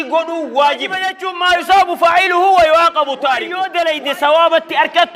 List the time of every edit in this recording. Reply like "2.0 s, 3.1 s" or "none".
1.3 s, 3.6 s